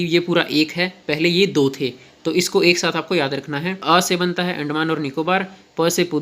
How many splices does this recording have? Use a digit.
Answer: 1